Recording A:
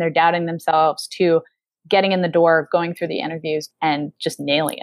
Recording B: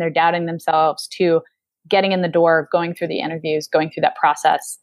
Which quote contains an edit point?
A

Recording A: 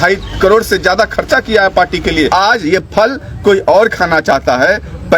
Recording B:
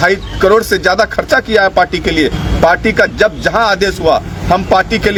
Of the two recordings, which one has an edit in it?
A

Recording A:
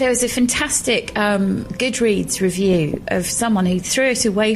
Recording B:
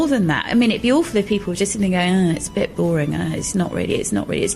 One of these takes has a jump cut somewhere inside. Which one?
A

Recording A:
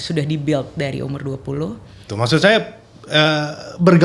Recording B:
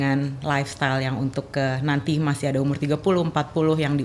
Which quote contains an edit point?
A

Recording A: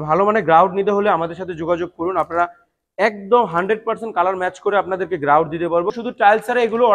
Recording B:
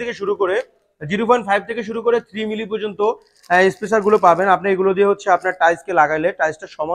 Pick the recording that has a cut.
A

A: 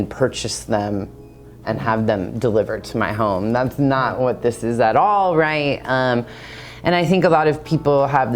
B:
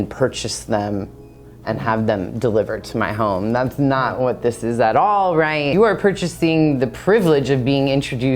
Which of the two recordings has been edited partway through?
B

